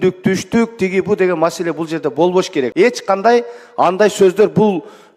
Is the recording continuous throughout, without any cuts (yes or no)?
no